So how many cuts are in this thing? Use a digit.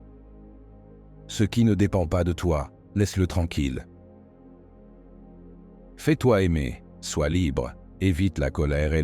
2